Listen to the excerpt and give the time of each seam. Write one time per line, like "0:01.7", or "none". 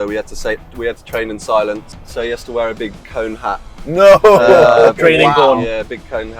0:02.0

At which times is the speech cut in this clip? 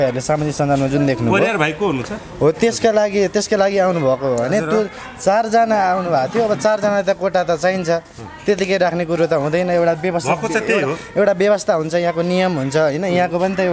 none

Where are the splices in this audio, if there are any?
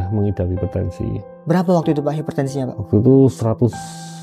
none

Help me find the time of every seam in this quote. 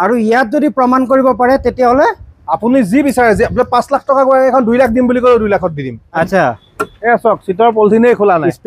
0:06.2

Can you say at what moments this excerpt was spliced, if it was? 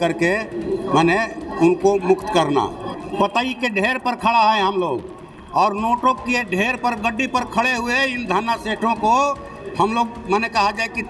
0:02.9

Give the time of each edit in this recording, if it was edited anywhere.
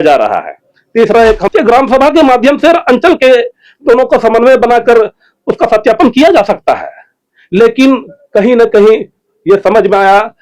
0:01.4

